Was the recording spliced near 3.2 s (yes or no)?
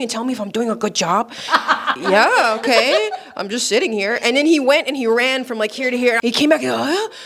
no